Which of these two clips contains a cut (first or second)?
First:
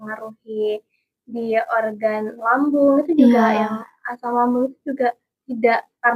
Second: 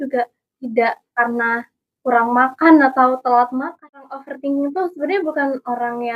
second